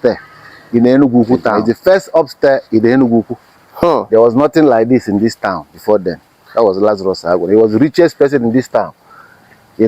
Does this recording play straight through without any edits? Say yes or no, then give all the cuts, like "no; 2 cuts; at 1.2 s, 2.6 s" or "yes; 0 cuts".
no; 1 cut; at 1.6 s